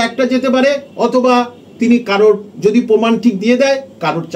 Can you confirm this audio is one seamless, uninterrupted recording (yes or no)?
yes